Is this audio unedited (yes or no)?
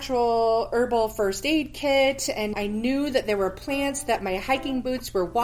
yes